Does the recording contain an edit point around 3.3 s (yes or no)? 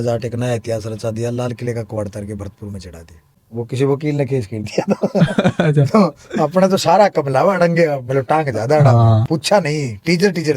yes